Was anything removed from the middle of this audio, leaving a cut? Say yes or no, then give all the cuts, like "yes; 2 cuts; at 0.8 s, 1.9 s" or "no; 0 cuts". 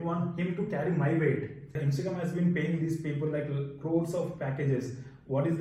yes; 1 cut; at 1.8 s